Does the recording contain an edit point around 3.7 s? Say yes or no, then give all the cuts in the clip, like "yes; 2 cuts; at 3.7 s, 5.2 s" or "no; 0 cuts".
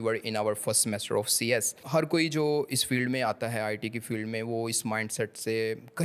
no; 1 cut; at 1.8 s